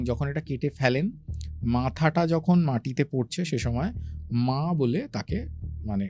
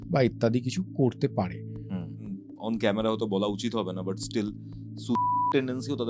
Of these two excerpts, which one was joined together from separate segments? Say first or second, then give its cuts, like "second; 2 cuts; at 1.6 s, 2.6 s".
second; 1 cut; at 2.3 s